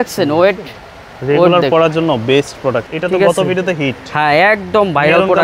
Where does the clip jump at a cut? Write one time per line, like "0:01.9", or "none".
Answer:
0:02.9